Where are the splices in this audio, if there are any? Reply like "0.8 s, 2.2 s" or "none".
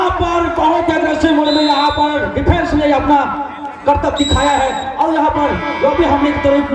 none